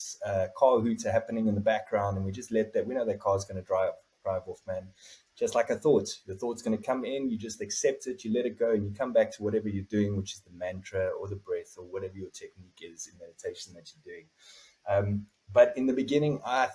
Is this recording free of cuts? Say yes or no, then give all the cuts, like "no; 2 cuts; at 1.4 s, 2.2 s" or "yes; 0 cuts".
yes; 0 cuts